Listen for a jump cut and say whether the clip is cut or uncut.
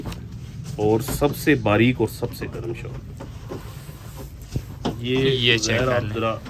uncut